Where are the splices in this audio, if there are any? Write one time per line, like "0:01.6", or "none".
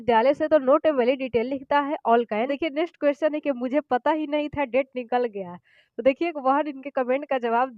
0:02.5